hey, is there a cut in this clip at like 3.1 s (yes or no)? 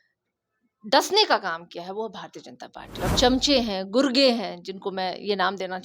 yes